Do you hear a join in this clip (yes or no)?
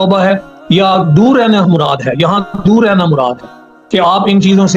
no